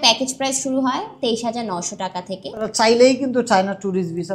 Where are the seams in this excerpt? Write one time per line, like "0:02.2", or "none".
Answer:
0:02.6

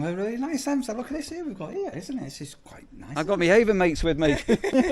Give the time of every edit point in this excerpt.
0:03.2

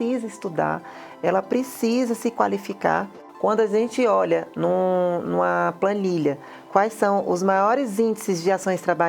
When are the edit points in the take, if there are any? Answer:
0:03.2

